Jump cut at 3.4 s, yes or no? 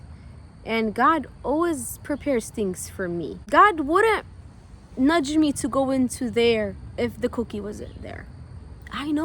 yes